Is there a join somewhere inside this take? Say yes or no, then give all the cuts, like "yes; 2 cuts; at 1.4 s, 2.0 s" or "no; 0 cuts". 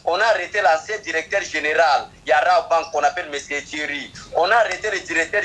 no; 0 cuts